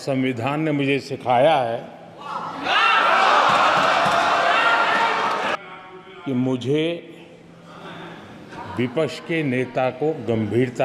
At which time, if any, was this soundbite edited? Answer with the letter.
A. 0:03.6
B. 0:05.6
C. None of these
B